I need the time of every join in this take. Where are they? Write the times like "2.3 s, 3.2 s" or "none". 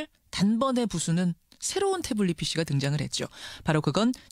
3.4 s